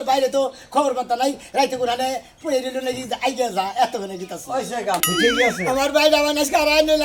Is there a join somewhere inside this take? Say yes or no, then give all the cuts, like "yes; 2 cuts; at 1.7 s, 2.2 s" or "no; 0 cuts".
yes; 1 cut; at 5.0 s